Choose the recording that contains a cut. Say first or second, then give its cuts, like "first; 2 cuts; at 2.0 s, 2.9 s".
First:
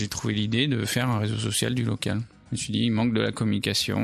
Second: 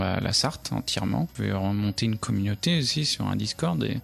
second; 1 cut; at 1.3 s